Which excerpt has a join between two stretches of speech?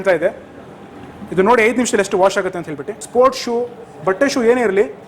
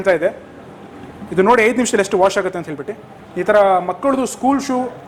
first; 1 cut; at 2.9 s

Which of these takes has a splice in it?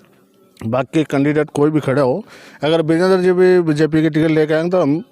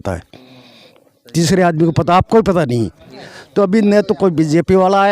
second; 1 cut; at 3.2 s

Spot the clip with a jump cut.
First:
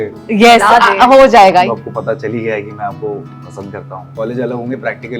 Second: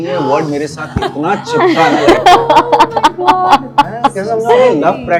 first; 2 cuts; at 1.7 s, 4.1 s

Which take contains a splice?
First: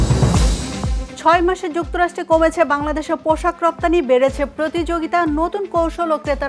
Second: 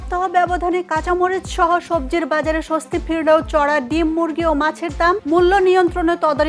first; 1 cut; at 1.0 s

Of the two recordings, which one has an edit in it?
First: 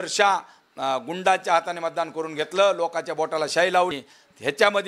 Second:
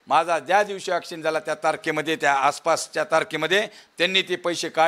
first; 1 cut; at 3.9 s

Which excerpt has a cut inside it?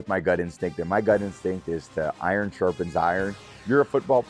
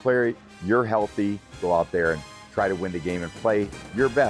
second; 1 cut; at 1.6 s

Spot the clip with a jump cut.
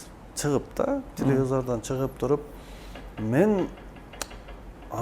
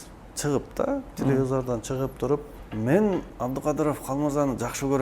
second; 2 cuts; at 2.6 s, 3.3 s

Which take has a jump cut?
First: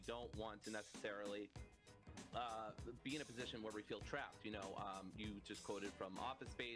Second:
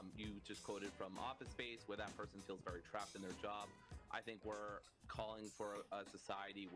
second; 1 cut; at 5.0 s

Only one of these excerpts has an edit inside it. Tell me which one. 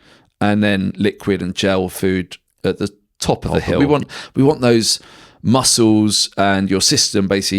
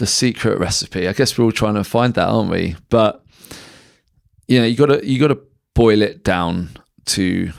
first; 1 cut; at 3.8 s

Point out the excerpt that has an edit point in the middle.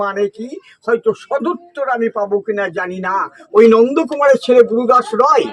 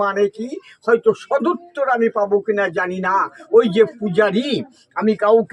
first; 1 cut; at 3.4 s

